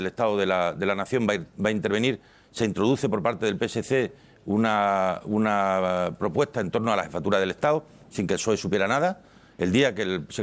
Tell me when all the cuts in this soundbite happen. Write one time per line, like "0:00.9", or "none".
0:09.3